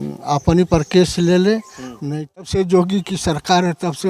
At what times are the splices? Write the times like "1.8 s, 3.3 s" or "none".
2.4 s